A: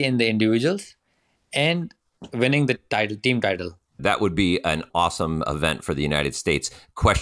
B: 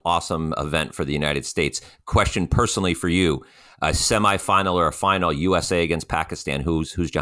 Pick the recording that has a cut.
A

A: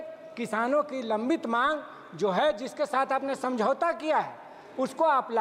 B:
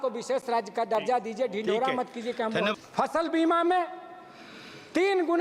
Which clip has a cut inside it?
B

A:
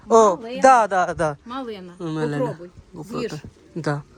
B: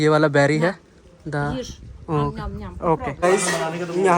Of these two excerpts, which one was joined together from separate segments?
B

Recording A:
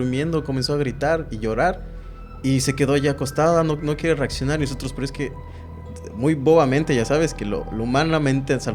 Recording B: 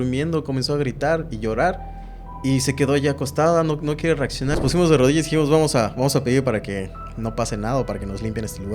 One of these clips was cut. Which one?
B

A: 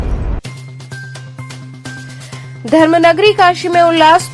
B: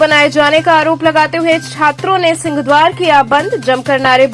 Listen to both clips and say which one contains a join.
A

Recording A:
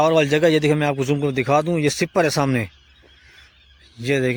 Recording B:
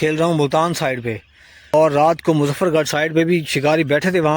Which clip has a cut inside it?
B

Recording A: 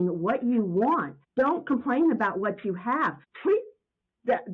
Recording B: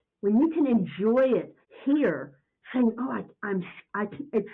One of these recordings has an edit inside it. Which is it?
A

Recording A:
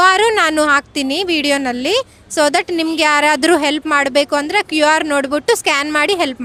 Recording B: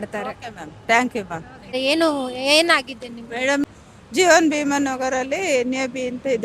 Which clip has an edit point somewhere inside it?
B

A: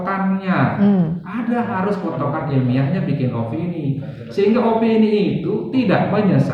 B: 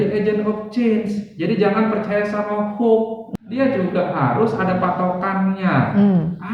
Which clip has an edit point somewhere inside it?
B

